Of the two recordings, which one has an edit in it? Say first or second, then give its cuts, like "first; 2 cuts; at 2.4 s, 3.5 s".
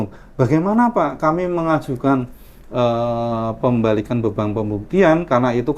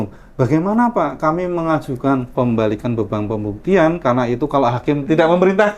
second; 2 cuts; at 2.3 s, 5.0 s